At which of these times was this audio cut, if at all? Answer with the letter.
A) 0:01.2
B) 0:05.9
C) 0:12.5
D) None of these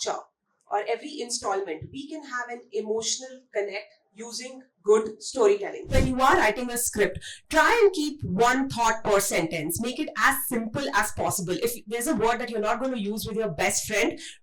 B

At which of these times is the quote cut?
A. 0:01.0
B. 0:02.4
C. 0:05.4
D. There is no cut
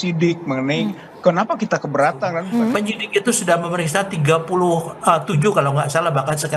B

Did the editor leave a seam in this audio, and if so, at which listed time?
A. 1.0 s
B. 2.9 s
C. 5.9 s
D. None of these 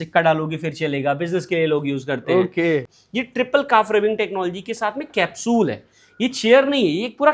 B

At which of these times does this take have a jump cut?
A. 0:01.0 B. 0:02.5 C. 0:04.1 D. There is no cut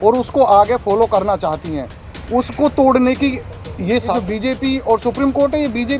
C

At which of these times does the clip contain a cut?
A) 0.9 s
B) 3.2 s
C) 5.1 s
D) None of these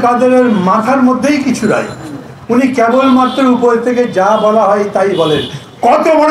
D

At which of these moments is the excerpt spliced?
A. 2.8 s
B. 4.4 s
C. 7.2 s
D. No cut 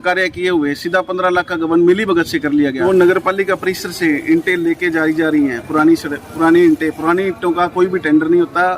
A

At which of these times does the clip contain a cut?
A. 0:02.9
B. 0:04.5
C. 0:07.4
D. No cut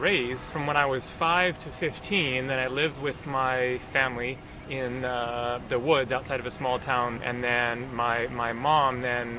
C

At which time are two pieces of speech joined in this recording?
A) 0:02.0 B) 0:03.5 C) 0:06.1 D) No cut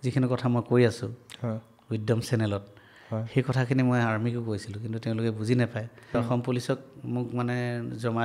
C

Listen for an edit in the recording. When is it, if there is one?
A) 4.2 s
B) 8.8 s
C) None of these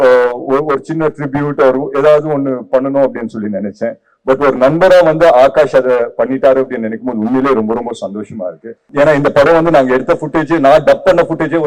B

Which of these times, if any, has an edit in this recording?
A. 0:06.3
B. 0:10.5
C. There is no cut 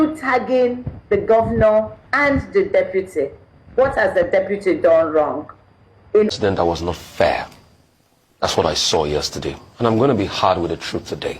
A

